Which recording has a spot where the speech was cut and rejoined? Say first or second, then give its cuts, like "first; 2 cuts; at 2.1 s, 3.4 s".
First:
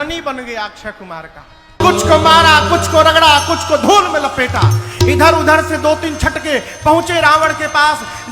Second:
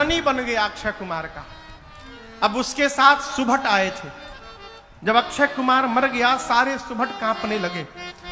first; 1 cut; at 1.8 s